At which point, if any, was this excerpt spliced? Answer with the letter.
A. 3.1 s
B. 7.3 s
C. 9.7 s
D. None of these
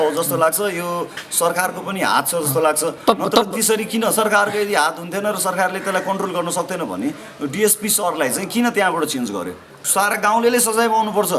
C